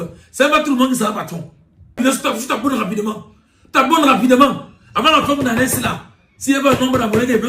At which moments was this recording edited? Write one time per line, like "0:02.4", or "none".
0:02.0

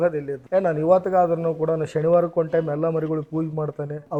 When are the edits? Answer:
none

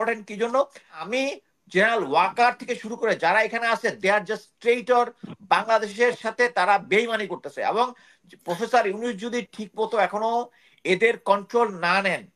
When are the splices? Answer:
0:01.0

